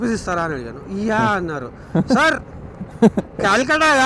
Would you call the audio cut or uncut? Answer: uncut